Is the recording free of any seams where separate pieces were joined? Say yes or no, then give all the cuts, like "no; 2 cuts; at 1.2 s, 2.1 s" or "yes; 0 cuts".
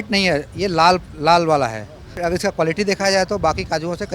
no; 1 cut; at 2.2 s